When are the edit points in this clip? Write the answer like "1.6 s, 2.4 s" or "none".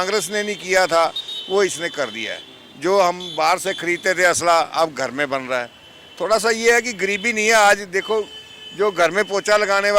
none